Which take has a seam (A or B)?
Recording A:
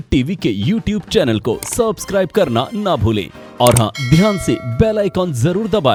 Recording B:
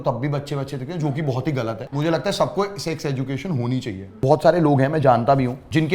B